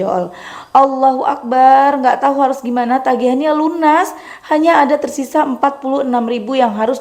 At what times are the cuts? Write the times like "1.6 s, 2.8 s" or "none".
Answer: none

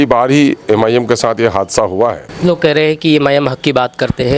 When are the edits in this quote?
2.3 s

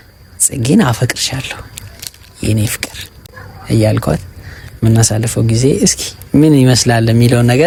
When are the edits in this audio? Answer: none

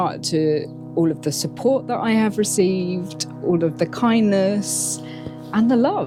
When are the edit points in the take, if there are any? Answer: none

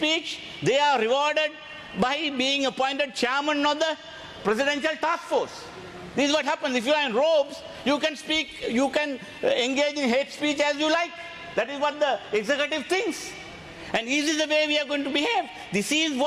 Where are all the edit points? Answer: none

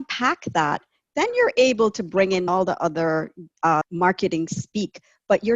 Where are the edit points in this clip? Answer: 2.5 s, 3.9 s

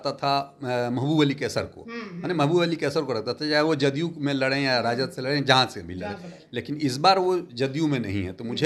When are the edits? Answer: none

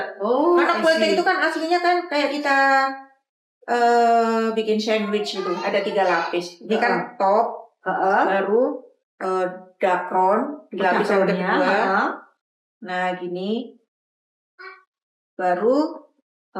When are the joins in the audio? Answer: none

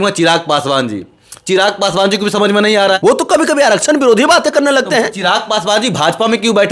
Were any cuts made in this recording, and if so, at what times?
3.0 s

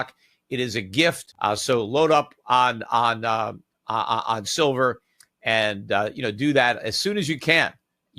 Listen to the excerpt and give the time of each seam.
1.3 s

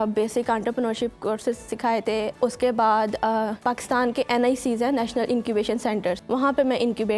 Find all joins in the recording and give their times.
2.3 s, 3.6 s, 6.2 s

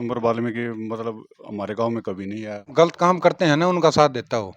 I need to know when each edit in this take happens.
2.7 s

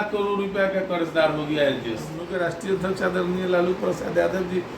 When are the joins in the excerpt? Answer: 2.2 s

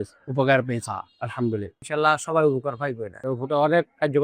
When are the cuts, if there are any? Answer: 1.9 s

